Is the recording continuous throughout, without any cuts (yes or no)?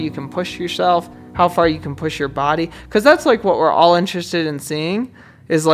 no